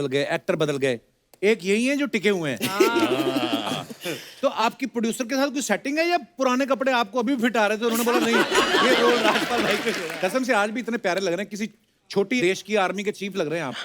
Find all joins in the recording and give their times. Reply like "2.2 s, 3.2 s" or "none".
10.1 s